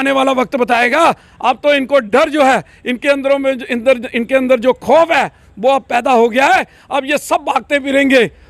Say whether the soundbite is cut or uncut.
uncut